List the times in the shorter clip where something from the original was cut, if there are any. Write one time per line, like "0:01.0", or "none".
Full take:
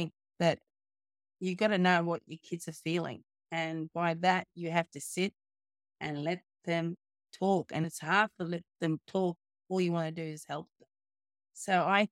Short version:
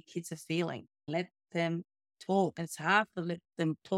0:01.1
0:02.6